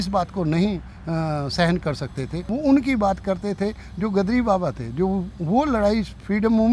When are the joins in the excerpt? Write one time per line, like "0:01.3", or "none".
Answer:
0:02.4